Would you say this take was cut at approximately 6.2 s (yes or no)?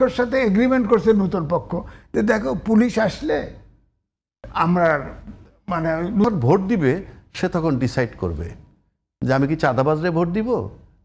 yes